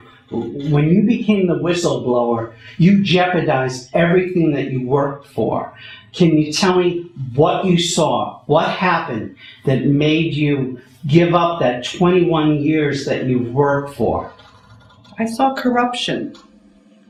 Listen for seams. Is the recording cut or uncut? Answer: uncut